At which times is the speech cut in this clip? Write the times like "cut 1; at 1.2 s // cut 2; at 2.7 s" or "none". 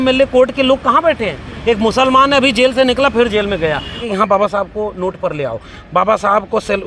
cut 1; at 4.0 s